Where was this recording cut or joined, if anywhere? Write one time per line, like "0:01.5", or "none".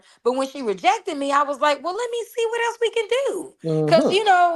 none